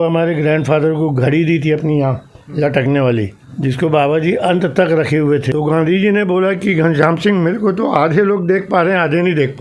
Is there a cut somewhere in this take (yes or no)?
yes